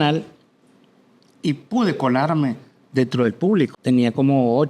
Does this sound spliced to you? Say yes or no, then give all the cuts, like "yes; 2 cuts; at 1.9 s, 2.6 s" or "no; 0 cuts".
yes; 1 cut; at 3.8 s